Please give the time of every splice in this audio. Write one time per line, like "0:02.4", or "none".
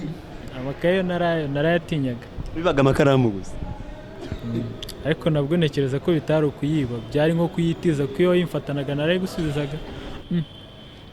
0:10.1